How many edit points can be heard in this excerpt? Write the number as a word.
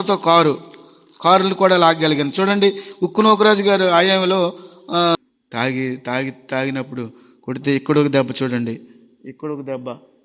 one